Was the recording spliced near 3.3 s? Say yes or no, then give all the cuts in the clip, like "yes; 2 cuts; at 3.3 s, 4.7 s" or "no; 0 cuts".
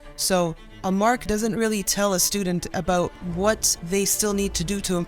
yes; 1 cut; at 3.3 s